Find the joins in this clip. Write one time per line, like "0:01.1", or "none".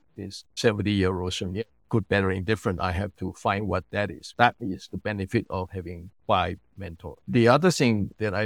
0:01.8
0:04.2
0:07.2